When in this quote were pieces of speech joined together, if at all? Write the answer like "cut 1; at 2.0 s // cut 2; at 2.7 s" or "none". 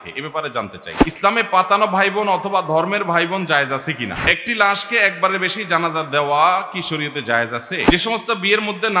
cut 1; at 0.9 s // cut 2; at 4.2 s // cut 3; at 7.9 s